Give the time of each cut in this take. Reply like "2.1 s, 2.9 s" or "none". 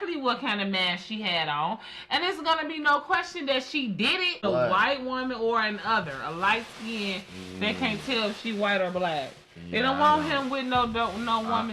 4.4 s